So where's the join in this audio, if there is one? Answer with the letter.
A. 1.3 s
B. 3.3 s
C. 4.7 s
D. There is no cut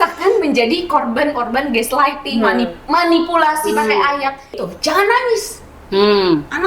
C